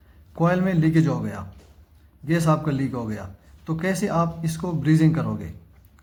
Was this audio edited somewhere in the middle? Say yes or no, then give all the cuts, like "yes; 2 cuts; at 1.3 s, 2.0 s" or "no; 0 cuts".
no; 0 cuts